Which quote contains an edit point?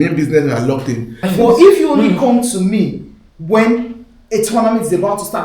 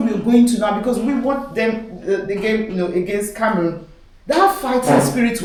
first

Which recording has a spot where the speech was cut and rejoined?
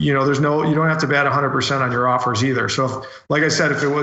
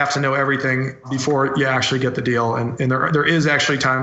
second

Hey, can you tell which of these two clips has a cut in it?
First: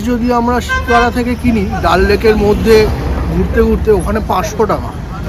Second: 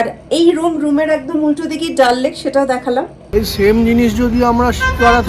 second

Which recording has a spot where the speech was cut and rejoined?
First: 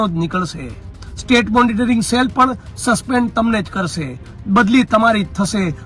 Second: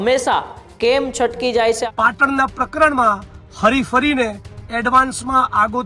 second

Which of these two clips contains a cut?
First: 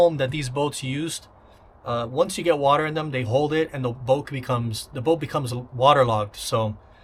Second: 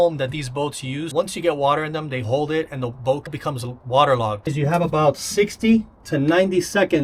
second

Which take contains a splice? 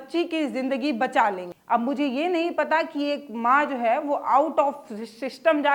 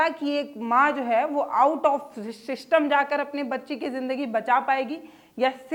first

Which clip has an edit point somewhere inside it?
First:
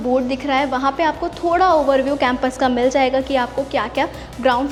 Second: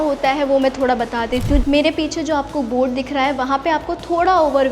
second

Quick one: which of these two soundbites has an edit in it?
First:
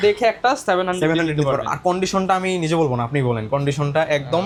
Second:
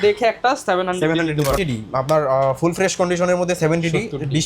second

